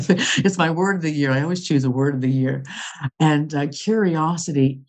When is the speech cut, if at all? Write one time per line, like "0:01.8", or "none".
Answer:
none